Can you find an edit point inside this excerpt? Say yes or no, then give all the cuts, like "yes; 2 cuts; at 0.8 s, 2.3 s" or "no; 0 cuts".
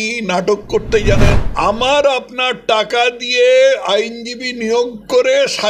yes; 1 cut; at 1.4 s